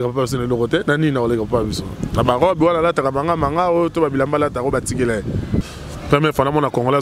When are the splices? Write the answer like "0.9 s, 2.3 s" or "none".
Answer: 5.7 s